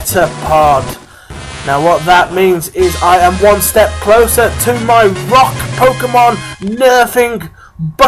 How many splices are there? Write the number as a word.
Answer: one